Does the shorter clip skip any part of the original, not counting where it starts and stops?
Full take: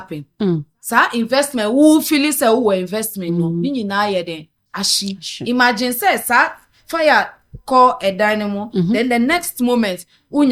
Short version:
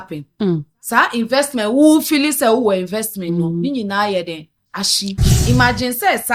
no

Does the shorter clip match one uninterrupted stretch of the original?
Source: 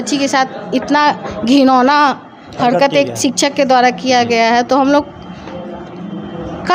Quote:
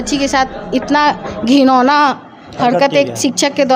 yes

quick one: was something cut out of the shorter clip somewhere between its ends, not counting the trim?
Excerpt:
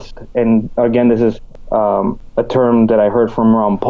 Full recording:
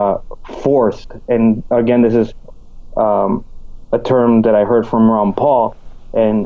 yes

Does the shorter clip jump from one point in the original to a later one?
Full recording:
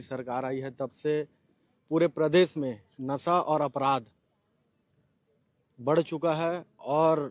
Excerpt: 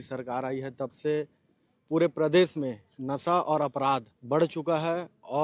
yes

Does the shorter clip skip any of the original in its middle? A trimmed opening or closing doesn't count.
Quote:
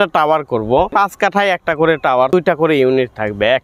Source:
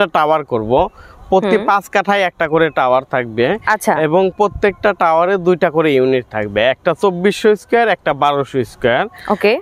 yes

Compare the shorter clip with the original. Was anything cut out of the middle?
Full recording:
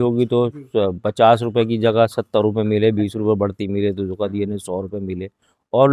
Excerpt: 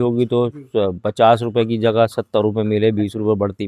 no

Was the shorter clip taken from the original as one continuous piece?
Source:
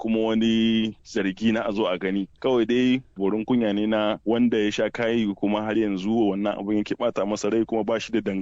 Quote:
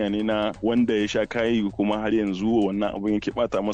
yes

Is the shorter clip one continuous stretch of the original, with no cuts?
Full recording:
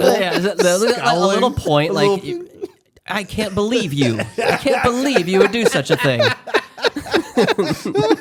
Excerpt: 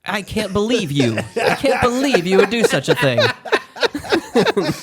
yes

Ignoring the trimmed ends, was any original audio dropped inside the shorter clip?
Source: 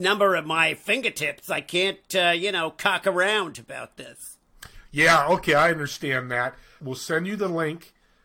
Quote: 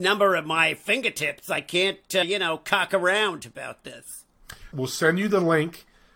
yes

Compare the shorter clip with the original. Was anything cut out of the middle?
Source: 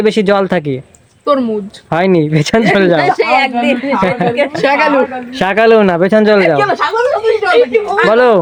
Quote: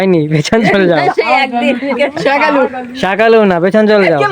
yes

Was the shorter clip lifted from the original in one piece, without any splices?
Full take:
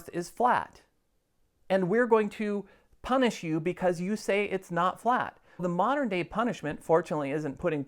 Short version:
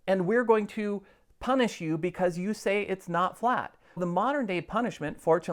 yes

